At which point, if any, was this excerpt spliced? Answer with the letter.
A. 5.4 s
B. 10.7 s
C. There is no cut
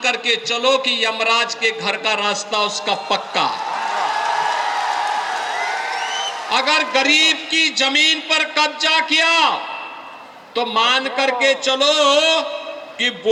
C